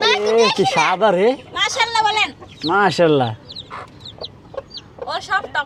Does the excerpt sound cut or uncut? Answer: uncut